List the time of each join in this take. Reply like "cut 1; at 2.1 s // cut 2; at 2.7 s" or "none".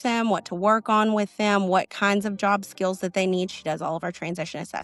none